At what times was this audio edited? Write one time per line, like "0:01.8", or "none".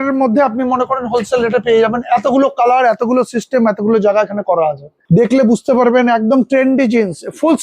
0:04.9

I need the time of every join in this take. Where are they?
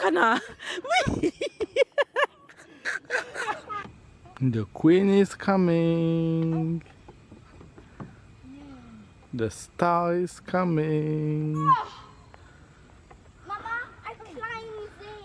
0:03.8

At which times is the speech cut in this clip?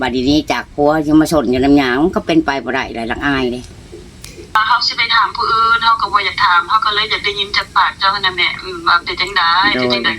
0:04.5

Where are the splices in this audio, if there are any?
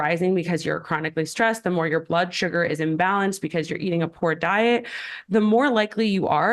none

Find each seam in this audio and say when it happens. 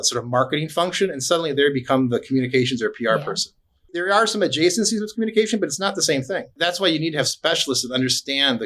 0:03.9
0:06.5

